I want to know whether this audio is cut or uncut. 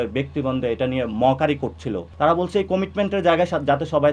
cut